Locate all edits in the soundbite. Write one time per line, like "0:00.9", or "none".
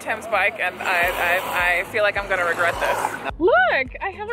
0:03.2